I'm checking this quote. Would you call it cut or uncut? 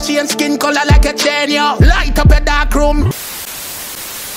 cut